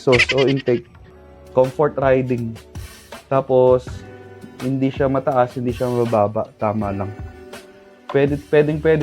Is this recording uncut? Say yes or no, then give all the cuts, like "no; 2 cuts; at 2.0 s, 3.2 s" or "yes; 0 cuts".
no; 1 cut; at 1.0 s